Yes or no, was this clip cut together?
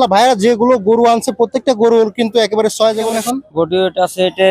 yes